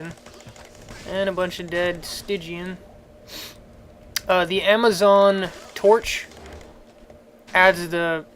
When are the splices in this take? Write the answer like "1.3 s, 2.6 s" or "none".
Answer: 7.1 s